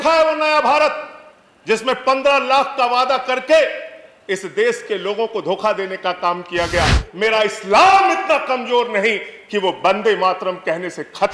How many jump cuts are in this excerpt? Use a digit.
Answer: 1